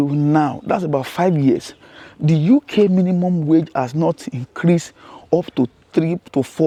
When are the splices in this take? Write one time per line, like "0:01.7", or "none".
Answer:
none